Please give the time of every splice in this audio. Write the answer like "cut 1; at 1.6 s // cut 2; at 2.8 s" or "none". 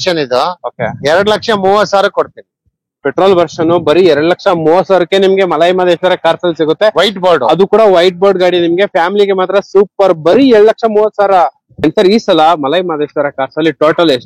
cut 1; at 11.7 s